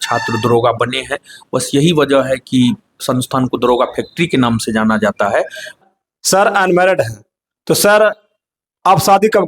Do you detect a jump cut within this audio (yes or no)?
yes